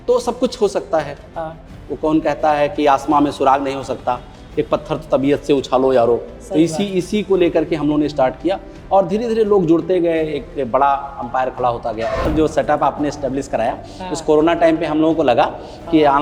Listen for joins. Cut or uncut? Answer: cut